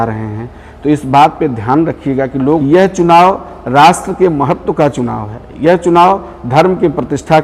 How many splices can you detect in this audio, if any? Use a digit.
1